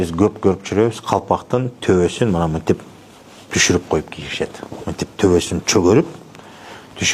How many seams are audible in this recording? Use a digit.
0